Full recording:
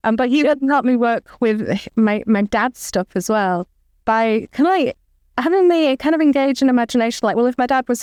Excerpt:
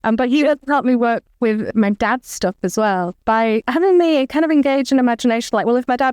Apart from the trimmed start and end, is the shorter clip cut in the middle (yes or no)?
yes